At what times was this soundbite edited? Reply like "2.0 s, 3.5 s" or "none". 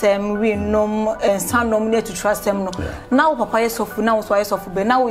none